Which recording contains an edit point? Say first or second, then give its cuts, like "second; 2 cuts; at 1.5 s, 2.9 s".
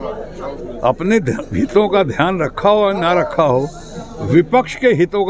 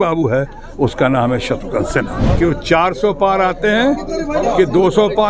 second; 1 cut; at 2.2 s